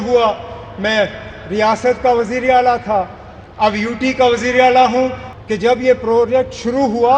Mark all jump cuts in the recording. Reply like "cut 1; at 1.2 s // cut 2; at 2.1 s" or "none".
cut 1; at 5.3 s